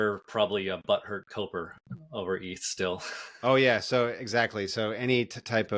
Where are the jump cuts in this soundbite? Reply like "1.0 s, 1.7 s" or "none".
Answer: none